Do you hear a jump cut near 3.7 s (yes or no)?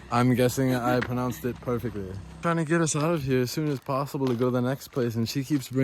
no